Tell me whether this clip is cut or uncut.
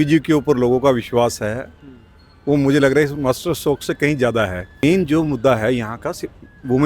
cut